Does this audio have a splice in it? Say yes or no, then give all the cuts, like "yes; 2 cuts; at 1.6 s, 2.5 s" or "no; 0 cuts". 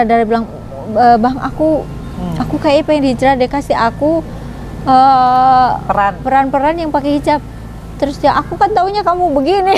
no; 0 cuts